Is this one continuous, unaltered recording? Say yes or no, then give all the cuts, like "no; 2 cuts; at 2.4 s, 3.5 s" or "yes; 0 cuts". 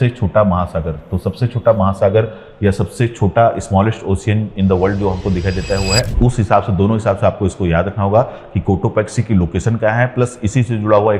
no; 1 cut; at 6.1 s